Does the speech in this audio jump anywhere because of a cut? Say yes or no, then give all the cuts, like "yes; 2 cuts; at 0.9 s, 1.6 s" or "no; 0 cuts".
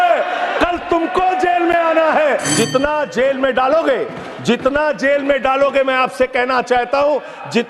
yes; 1 cut; at 2.5 s